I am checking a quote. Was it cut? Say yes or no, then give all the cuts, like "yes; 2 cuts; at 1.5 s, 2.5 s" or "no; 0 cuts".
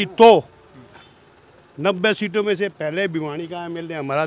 no; 0 cuts